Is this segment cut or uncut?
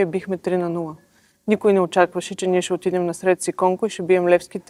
uncut